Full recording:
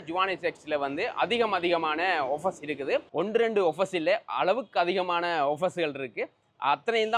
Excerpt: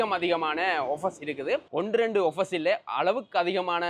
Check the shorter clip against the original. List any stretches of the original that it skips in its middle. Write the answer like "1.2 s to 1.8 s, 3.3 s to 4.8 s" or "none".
none